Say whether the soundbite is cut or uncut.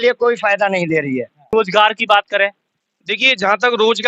cut